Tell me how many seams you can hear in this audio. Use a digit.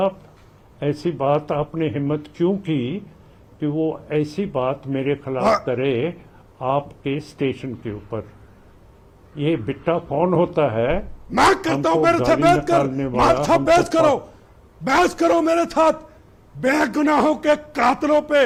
0